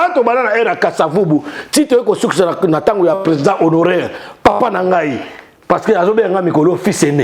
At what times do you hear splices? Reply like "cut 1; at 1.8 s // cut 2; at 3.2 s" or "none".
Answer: none